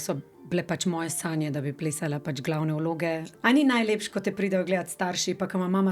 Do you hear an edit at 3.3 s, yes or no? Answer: yes